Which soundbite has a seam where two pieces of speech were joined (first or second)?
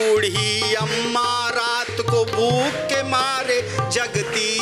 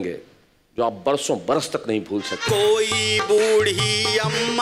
second